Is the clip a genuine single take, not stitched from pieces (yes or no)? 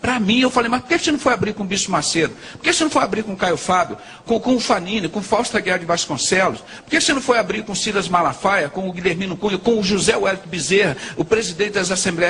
yes